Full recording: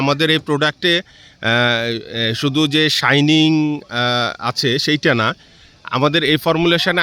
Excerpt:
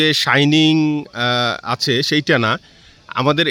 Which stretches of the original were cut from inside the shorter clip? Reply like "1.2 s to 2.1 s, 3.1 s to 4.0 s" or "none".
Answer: none